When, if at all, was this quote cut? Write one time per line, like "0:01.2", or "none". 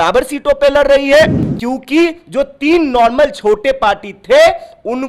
0:01.5